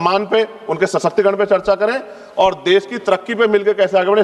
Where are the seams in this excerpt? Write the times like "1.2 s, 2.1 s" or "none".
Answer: none

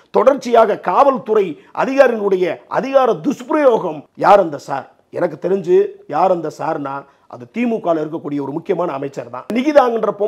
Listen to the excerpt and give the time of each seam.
4.0 s, 9.5 s

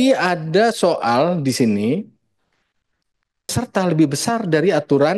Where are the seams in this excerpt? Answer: 3.6 s

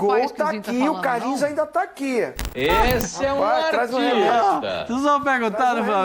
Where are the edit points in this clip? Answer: 2.4 s

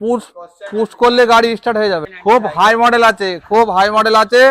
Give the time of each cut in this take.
2.1 s

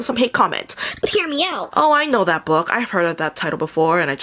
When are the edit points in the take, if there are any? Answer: 1.6 s

